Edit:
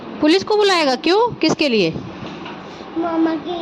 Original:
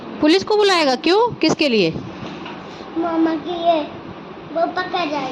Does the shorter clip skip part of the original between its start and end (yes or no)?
no